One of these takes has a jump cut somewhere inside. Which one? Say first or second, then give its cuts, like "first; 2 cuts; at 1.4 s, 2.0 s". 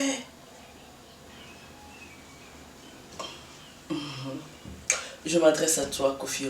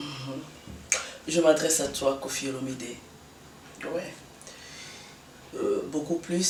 first; 1 cut; at 1.3 s